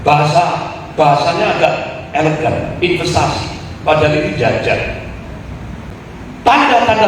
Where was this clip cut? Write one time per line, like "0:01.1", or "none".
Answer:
0:05.9